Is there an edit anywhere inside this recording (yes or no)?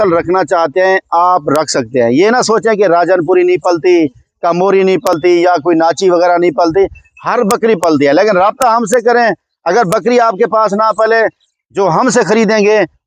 no